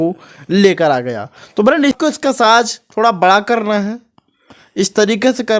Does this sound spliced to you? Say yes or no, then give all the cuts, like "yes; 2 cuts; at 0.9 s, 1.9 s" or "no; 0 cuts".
yes; 1 cut; at 2.0 s